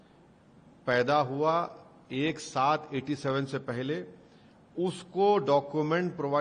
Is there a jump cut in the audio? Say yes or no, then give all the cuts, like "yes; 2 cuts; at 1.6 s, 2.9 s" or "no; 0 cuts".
no; 0 cuts